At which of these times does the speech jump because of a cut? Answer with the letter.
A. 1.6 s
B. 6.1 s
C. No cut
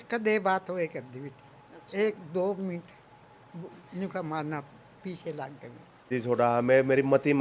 B